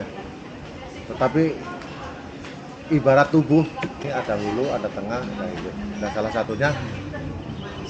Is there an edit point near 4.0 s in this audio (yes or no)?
yes